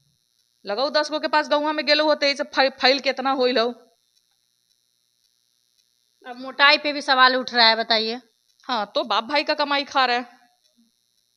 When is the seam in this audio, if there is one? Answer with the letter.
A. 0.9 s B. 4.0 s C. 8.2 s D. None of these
D